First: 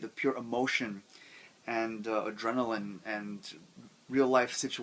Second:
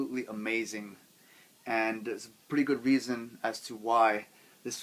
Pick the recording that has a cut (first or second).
second